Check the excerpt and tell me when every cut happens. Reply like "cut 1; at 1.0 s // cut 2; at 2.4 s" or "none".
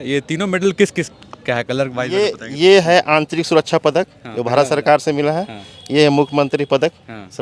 none